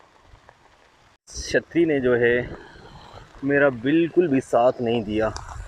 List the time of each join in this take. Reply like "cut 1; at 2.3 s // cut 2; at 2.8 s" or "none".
cut 1; at 1.4 s